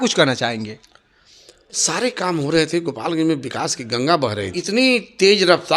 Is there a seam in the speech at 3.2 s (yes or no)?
no